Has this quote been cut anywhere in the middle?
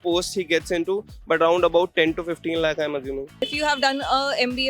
yes; 1 cut; at 3.3 s

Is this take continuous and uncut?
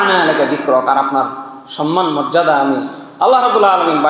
yes; 0 cuts

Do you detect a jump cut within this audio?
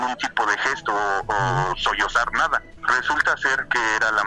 yes; 1 cut; at 2.8 s

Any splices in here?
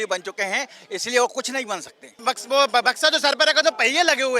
yes; 1 cut; at 2.2 s

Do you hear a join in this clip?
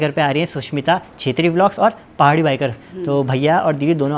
no; 0 cuts

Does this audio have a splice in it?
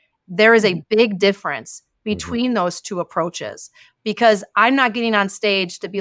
no; 0 cuts

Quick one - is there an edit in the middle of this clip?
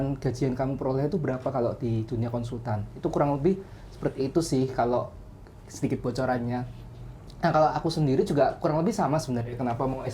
no; 0 cuts

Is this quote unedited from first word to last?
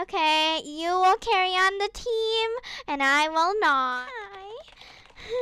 no; 1 cut; at 3.9 s

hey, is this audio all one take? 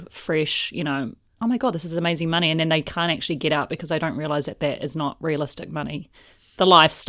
yes; 0 cuts

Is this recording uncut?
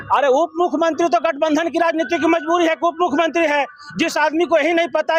yes; 0 cuts

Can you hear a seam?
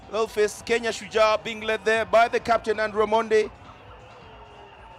no; 0 cuts

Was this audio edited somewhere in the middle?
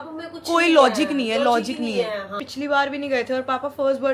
yes; 1 cut; at 2.4 s

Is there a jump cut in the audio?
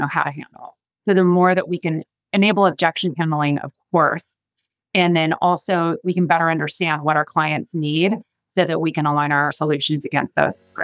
yes; 1 cut; at 9.5 s

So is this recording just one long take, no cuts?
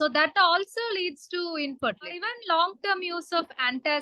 no; 1 cut; at 2.3 s

